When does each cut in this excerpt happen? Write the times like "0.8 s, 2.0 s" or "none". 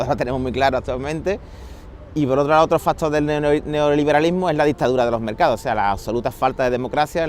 3.0 s